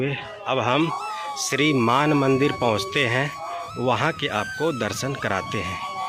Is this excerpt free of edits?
yes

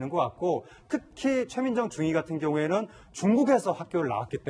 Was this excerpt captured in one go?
no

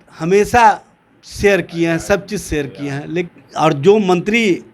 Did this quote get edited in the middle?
yes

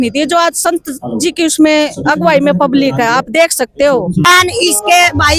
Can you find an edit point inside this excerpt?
yes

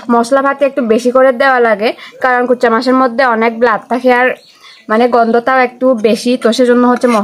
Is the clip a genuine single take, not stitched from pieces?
yes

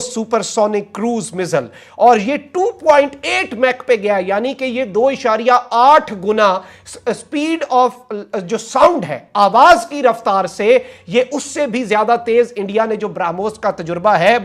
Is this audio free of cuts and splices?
yes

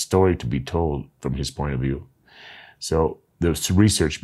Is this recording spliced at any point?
no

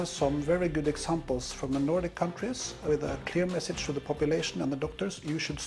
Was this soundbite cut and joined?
yes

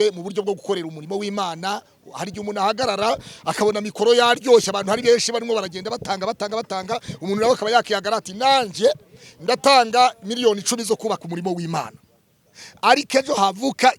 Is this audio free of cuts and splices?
yes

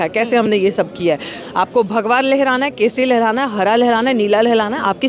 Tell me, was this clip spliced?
yes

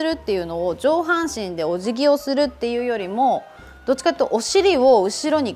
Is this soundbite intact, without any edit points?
yes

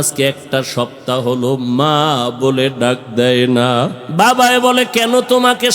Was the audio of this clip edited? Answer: yes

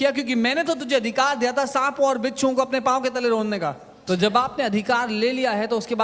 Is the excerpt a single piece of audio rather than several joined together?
no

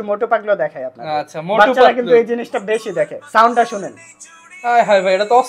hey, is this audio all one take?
yes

